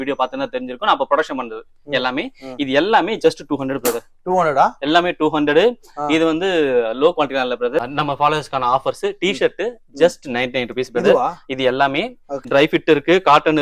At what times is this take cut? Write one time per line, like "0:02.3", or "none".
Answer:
0:07.9
0:12.5